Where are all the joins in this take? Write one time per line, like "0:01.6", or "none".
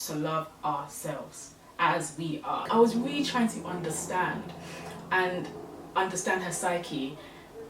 0:02.7